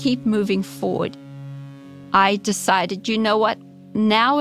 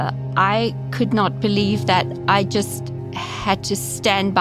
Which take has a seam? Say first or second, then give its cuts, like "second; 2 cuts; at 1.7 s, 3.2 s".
first; 1 cut; at 1.3 s